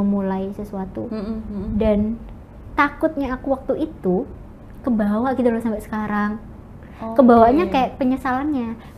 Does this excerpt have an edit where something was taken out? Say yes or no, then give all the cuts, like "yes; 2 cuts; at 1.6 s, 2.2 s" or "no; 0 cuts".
no; 0 cuts